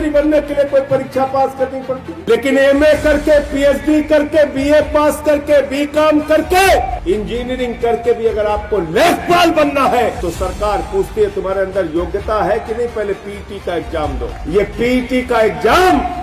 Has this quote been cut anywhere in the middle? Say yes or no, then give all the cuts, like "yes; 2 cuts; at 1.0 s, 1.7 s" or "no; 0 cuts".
yes; 4 cuts; at 2.1 s, 7.0 s, 10.2 s, 14.3 s